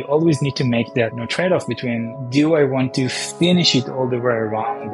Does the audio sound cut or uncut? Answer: uncut